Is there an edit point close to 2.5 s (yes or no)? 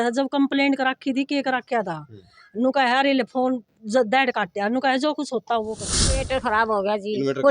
no